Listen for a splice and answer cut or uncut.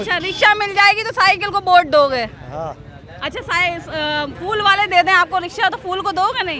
uncut